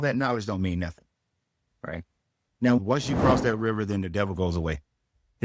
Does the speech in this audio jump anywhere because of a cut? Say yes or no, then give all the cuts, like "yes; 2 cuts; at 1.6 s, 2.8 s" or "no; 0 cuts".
yes; 1 cut; at 2.8 s